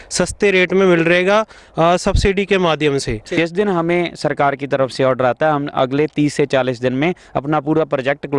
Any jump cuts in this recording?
yes; 1 cut; at 3.3 s

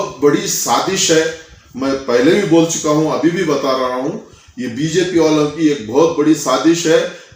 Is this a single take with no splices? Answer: yes; 0 cuts

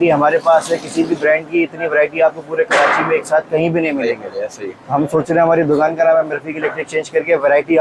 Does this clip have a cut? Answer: no; 0 cuts

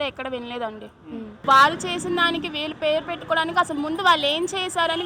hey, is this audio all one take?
no; 1 cut; at 1.4 s

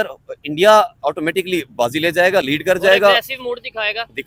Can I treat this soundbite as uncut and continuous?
yes; 0 cuts

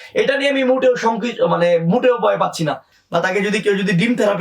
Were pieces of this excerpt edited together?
yes; 1 cut; at 2.9 s

